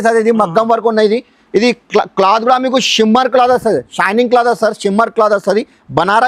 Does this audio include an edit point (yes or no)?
no